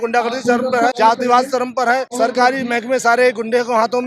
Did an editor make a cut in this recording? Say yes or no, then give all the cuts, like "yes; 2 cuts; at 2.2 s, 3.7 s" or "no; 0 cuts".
yes; 2 cuts; at 1.0 s, 2.1 s